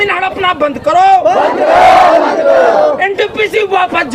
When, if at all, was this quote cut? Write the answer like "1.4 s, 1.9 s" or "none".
none